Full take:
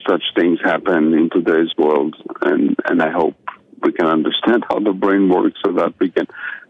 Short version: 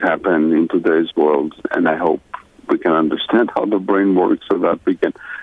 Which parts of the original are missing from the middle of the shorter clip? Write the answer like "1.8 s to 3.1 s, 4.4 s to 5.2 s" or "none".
2.3 s to 2.8 s